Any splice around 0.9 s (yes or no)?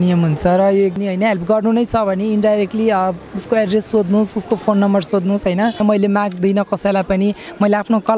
yes